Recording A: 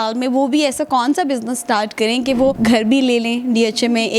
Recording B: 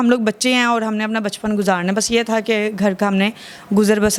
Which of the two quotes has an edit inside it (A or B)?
A